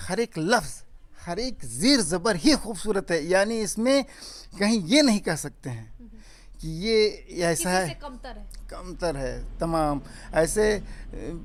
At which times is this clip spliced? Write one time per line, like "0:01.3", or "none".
none